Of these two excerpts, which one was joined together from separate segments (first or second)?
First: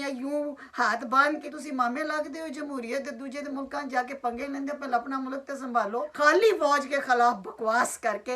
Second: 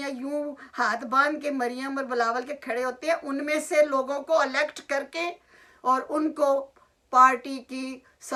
first